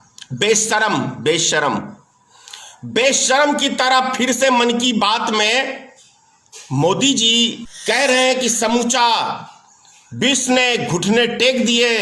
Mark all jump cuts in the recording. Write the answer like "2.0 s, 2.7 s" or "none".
7.7 s